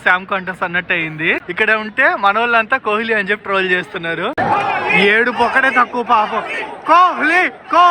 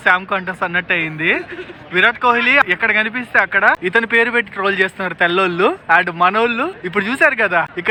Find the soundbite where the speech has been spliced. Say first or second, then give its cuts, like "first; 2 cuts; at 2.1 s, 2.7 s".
first; 2 cuts; at 1.5 s, 4.3 s